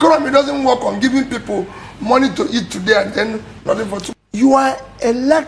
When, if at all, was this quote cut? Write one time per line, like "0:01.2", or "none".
0:04.0